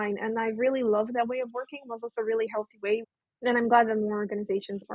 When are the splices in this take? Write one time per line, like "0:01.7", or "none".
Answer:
0:03.1